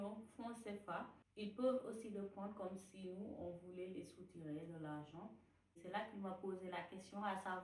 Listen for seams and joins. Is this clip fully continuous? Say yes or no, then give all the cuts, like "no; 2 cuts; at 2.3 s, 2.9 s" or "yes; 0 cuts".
no; 2 cuts; at 1.2 s, 5.7 s